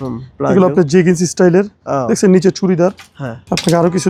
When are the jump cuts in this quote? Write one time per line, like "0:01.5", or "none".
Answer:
none